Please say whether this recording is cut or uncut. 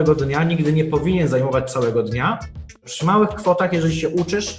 cut